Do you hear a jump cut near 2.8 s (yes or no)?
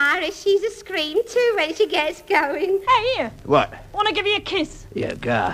yes